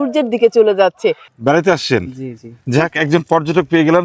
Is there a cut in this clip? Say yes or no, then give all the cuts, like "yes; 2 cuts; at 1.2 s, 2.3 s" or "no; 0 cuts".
yes; 1 cut; at 1.3 s